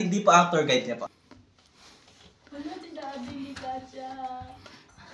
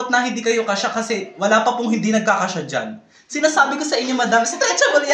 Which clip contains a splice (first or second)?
first